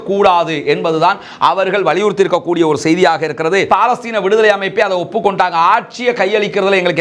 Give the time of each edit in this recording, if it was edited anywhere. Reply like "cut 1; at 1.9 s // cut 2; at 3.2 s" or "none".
cut 1; at 3.7 s